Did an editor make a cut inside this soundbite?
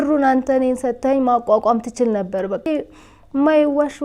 yes; 1 cut; at 2.6 s

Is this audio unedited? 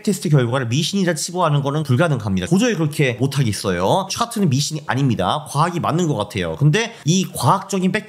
no; 2 cuts; at 2.0 s, 6.9 s

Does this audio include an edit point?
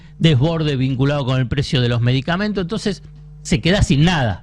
no; 0 cuts

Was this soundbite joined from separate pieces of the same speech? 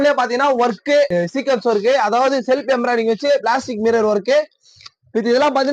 yes; 1 cut; at 1.1 s

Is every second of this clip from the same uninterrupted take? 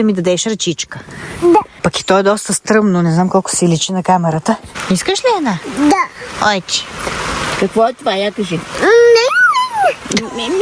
no; 2 cuts; at 1.7 s, 4.8 s

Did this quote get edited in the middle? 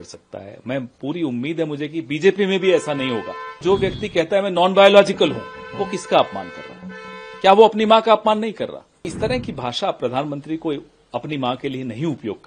yes; 2 cuts; at 3.5 s, 9.1 s

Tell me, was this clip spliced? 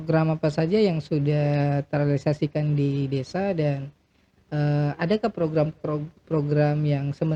no; 0 cuts

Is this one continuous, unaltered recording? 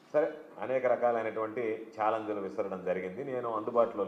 yes; 0 cuts

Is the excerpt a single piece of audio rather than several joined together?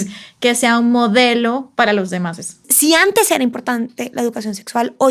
no; 1 cut; at 2.7 s

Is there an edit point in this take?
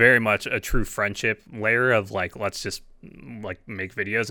no; 0 cuts

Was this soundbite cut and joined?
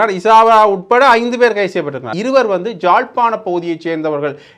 yes; 1 cut; at 2.1 s

